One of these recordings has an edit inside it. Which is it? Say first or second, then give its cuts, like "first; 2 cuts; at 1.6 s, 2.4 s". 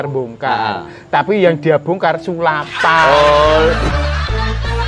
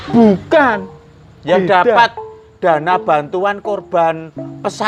first; 1 cut; at 3.9 s